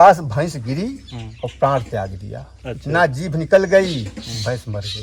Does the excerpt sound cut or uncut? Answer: uncut